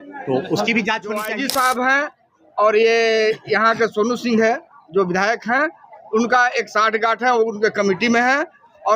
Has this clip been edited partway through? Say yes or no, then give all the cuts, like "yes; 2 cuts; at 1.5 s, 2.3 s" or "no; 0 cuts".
yes; 1 cut; at 1.3 s